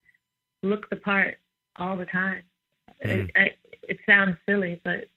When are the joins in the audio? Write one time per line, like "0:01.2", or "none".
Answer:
none